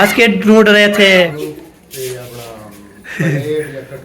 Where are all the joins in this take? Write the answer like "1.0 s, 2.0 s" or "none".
1.3 s